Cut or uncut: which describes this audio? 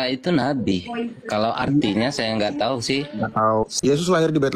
uncut